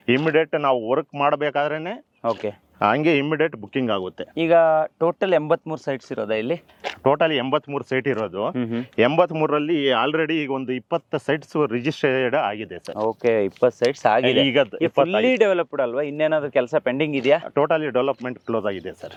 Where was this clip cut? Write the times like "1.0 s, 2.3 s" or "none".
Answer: none